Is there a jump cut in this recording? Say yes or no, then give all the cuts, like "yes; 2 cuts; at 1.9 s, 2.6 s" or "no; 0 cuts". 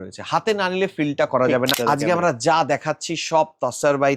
yes; 1 cut; at 1.7 s